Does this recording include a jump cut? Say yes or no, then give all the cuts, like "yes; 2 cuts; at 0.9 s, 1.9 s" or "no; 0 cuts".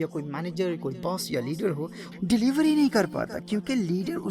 yes; 1 cut; at 2.1 s